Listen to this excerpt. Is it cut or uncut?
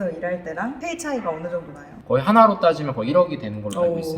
cut